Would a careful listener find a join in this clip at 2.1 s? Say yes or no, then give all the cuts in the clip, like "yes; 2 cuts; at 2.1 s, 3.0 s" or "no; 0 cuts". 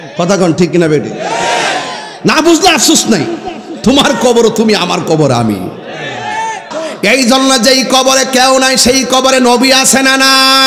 no; 1 cut; at 6.7 s